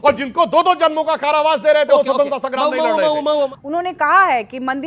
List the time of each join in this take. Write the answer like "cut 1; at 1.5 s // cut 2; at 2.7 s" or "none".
cut 1; at 3.5 s